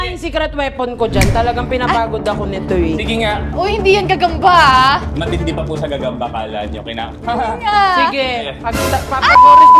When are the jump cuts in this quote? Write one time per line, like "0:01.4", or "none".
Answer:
0:03.5